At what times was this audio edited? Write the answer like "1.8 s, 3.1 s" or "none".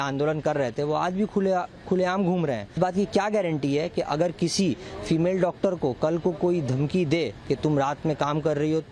2.8 s